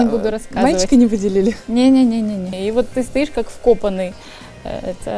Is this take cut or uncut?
cut